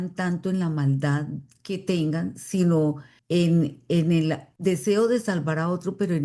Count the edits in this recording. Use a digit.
2